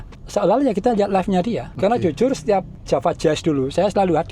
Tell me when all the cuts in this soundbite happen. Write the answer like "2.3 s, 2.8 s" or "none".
1.7 s, 2.7 s